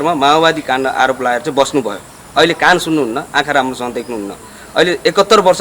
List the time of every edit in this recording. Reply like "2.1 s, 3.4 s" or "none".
none